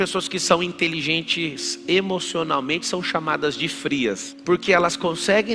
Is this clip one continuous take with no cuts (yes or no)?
no